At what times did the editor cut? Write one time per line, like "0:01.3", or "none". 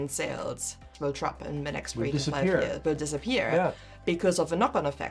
0:00.9